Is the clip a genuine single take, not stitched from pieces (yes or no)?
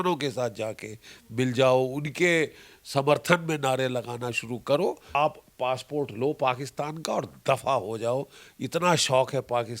no